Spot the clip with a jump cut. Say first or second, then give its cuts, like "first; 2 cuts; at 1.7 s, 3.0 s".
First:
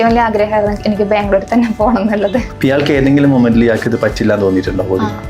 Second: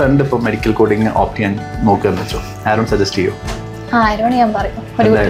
first; 1 cut; at 2.5 s